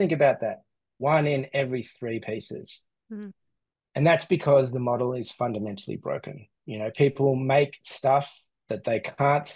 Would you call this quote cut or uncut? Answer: uncut